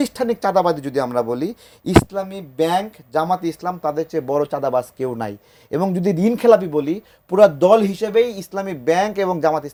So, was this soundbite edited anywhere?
no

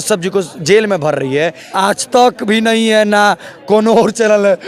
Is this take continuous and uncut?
no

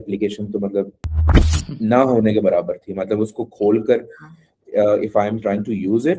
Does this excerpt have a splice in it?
no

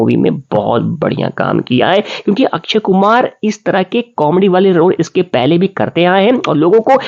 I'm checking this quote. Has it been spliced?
no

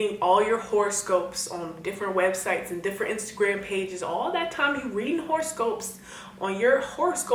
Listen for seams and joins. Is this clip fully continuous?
yes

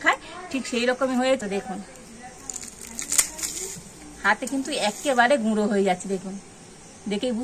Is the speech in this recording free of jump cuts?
no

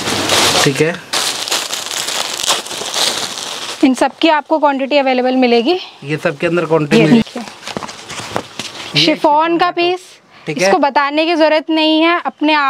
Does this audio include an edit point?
yes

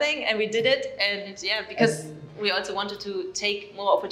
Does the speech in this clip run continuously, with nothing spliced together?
yes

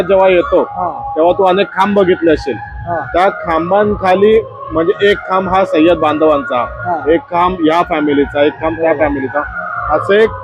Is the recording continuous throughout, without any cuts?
yes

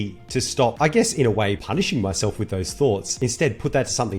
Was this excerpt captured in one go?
no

